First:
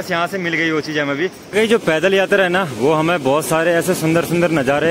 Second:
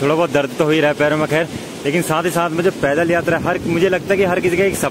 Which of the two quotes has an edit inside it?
first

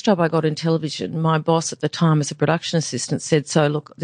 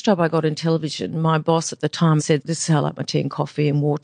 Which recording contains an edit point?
second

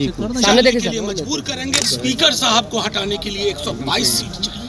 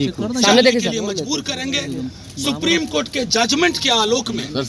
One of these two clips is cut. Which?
first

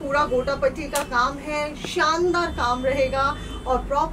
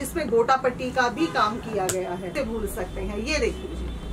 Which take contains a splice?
second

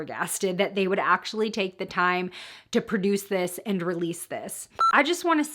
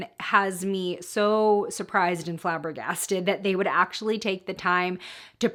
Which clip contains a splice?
first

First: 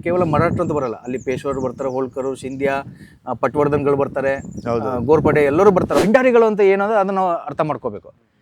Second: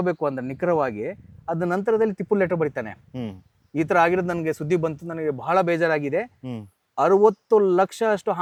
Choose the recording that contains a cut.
first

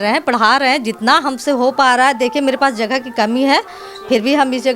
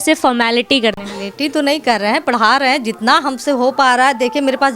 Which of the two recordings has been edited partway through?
second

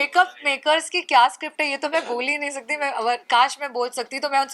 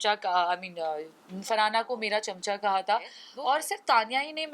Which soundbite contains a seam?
second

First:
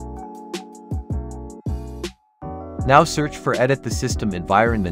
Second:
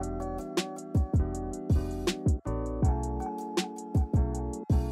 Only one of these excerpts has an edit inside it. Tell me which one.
first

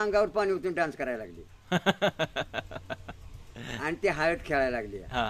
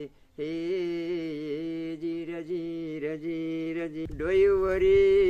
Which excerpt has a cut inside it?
second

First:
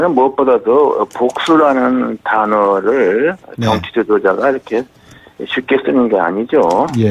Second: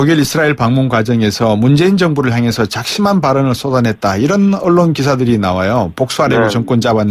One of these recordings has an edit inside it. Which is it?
first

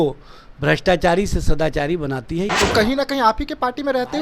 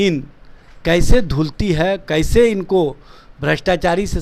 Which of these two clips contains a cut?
first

